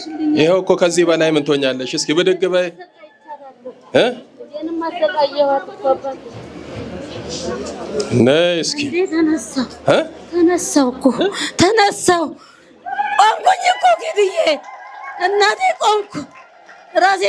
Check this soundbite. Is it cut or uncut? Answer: uncut